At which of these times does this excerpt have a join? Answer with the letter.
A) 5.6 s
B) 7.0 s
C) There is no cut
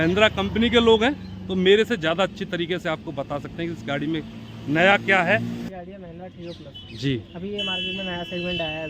A